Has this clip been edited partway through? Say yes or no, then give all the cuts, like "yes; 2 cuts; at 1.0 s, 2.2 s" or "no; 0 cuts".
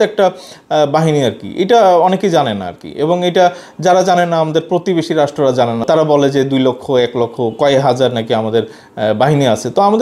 no; 0 cuts